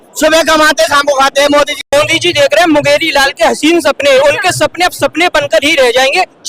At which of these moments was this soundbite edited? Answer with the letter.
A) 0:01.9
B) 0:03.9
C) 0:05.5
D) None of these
A